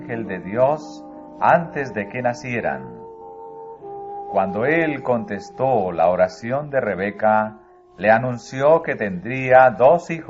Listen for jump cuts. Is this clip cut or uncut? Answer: cut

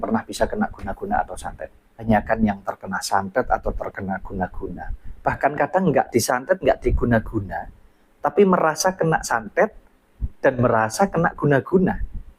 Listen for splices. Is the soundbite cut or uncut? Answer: cut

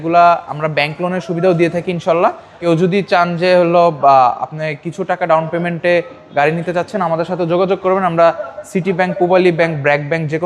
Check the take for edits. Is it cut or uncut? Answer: cut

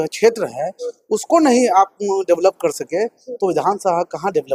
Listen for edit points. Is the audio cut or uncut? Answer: uncut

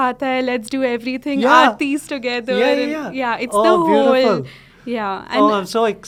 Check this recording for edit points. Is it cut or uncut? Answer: uncut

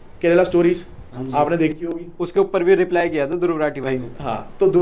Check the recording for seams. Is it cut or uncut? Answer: uncut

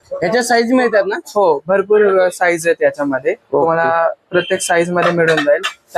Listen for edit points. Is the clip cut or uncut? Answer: uncut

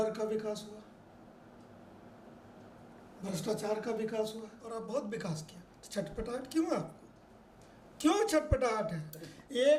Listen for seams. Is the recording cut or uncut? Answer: cut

